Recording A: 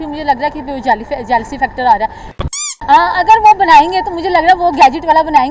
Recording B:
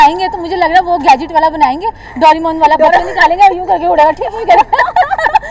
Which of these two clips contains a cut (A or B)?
A